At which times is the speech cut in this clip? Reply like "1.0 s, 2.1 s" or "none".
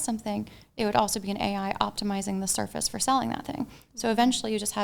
none